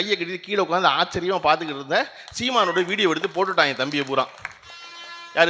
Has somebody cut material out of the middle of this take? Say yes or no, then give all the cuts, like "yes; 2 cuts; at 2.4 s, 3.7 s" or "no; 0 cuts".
no; 0 cuts